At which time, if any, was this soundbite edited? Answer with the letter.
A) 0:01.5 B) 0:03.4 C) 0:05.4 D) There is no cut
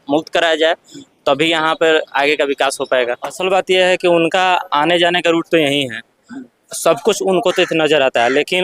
B